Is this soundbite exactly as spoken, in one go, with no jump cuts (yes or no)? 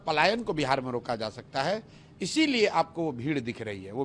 yes